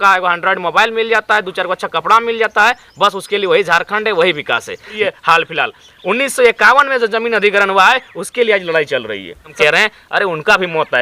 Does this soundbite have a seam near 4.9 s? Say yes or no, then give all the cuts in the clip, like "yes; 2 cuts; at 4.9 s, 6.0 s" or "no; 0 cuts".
yes; 2 cuts; at 4.9 s, 9.5 s